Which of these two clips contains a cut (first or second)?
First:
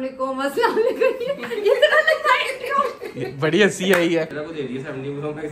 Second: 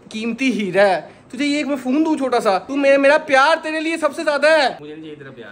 first